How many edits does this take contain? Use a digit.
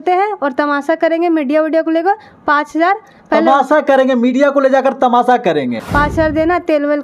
1